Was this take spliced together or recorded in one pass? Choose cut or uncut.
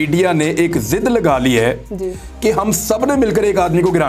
uncut